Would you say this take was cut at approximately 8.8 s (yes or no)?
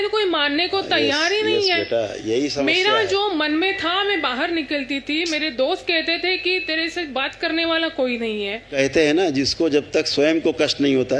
yes